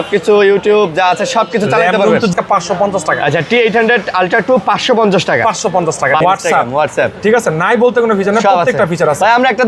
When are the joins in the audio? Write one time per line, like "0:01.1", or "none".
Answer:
0:02.3
0:06.2